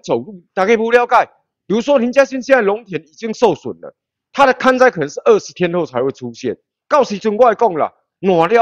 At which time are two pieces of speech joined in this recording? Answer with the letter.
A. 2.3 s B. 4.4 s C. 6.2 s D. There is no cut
D